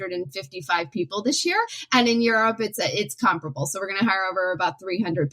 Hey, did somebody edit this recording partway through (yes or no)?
yes